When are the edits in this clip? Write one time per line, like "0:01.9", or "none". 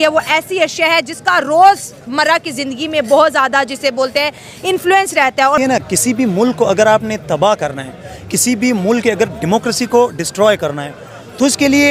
0:05.6